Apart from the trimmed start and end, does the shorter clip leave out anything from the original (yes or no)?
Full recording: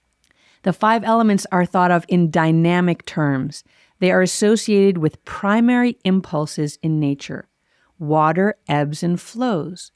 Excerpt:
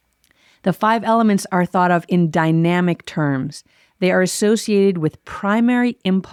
no